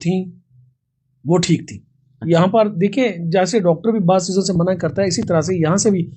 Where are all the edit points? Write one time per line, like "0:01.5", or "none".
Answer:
none